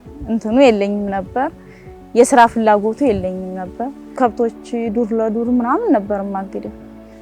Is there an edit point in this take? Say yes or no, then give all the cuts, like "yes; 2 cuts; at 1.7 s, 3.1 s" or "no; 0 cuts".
no; 0 cuts